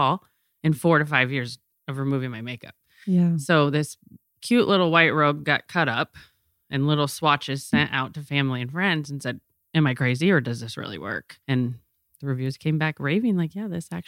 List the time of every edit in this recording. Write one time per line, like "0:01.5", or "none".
0:11.3

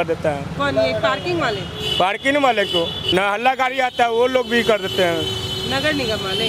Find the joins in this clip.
0:02.7

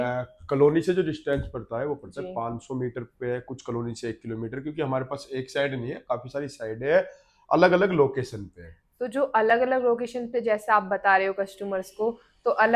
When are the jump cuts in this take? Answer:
none

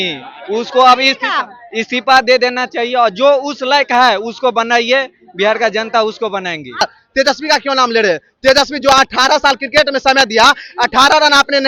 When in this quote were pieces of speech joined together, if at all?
0:06.8

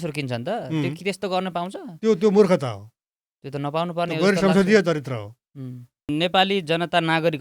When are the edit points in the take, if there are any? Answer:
0:06.1

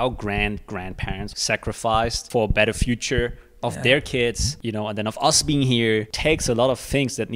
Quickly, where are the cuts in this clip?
0:01.3
0:02.2
0:04.5
0:06.1

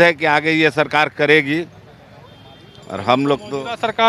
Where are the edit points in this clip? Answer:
none

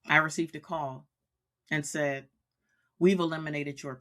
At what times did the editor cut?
none

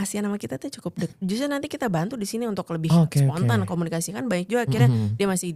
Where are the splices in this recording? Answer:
0:01.1

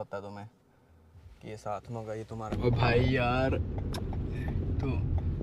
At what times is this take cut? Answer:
0:02.5

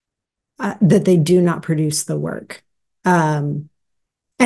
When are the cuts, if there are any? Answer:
none

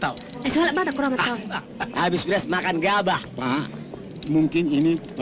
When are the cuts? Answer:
0:01.5
0:03.3

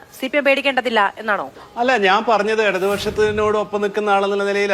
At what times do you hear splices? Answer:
0:01.6

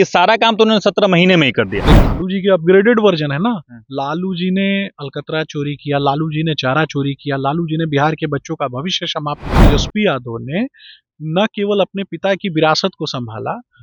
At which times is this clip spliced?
0:01.9
0:09.5

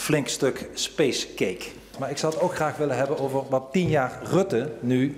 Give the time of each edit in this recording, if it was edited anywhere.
0:01.9

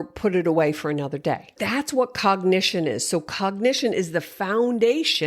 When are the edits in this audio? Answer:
0:01.6

